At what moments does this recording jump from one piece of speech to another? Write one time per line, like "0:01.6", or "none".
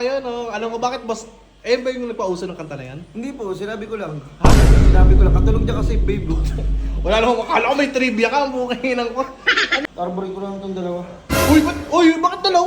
0:09.8